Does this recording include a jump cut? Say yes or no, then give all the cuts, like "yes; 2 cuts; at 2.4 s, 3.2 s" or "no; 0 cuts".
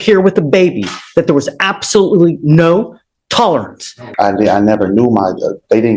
yes; 1 cut; at 4.1 s